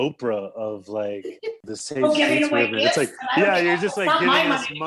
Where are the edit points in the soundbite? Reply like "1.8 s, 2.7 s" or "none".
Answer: 1.6 s